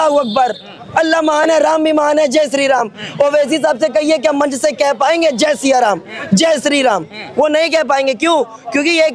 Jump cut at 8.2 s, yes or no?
no